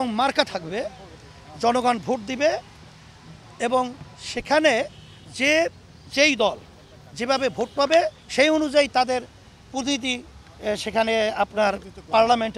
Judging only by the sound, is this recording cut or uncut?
uncut